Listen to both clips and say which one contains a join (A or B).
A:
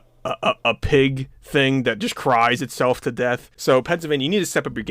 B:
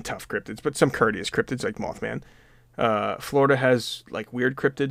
A